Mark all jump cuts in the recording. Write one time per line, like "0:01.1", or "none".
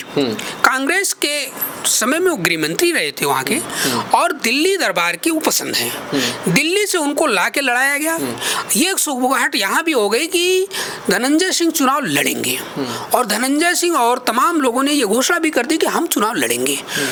none